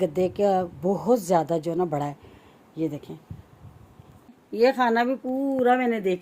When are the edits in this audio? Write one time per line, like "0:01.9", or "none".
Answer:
0:04.3